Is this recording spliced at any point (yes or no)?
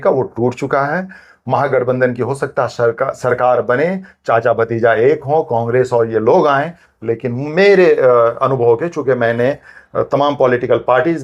no